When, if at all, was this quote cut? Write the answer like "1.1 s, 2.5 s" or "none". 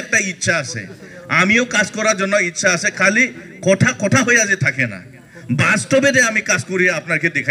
none